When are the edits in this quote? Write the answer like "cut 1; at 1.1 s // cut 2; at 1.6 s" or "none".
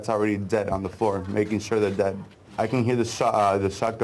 cut 1; at 2.4 s